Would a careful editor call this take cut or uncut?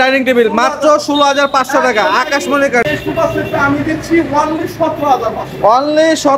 cut